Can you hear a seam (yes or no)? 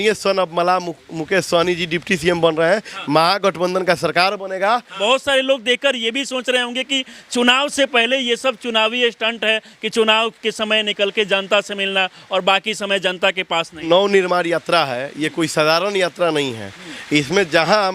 yes